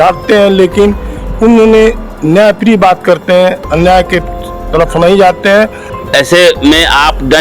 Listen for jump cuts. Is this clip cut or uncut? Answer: cut